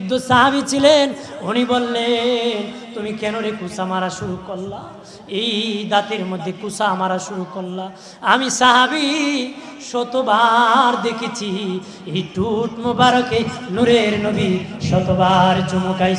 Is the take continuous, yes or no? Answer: yes